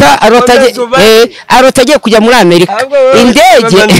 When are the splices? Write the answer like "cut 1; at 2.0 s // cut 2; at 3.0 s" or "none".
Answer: none